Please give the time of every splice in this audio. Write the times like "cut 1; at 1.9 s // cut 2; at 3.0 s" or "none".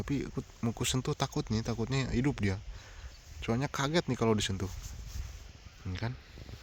none